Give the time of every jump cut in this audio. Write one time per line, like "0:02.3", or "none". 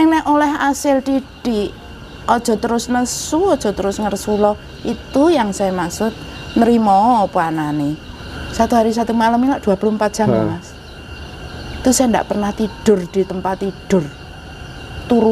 0:08.1